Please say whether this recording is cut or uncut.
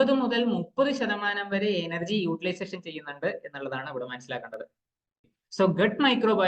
cut